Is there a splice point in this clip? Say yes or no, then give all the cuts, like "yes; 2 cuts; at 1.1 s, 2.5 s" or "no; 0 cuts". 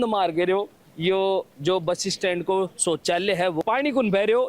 yes; 1 cut; at 3.6 s